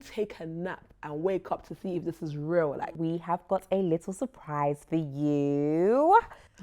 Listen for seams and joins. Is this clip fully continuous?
no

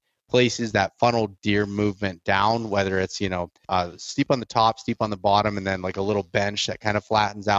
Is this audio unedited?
no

